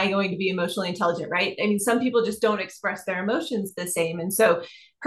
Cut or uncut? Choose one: uncut